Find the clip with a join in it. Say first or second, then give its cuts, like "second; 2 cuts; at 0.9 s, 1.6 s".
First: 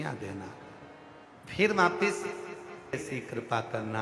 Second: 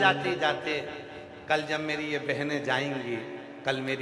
first; 1 cut; at 2.9 s